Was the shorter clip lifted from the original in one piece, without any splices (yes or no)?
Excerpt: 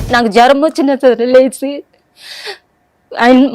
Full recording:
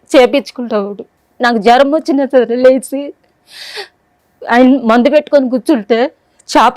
yes